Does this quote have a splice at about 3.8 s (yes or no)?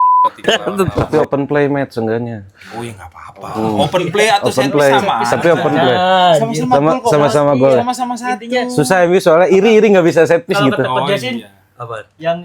no